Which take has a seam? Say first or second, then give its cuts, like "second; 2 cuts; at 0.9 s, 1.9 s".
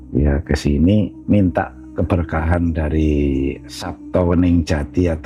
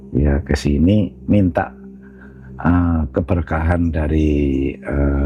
first; 2 cuts; at 1.9 s, 3.6 s